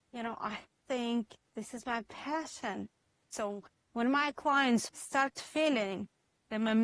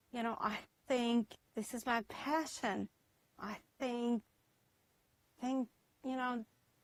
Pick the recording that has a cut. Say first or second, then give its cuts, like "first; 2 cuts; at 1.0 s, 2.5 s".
first; 2 cuts; at 3.3 s, 5.0 s